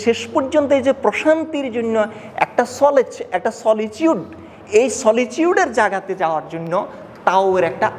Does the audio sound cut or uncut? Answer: uncut